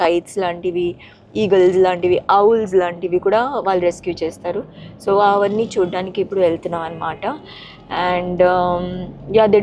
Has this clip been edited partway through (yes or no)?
no